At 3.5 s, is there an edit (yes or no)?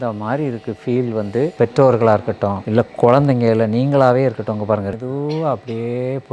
no